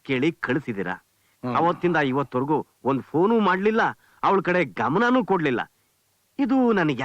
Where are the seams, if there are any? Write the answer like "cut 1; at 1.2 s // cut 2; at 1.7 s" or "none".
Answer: none

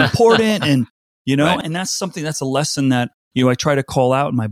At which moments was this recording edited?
cut 1; at 1.6 s // cut 2; at 3.2 s

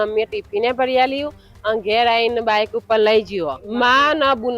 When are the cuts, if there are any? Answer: cut 1; at 3.6 s

